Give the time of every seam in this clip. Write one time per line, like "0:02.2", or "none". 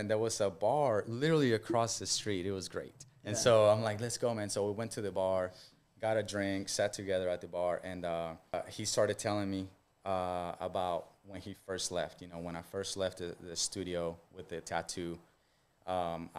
0:08.5